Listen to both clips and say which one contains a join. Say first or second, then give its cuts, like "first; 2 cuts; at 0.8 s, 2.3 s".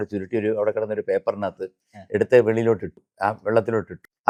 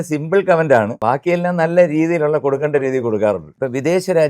second; 2 cuts; at 0.9 s, 3.5 s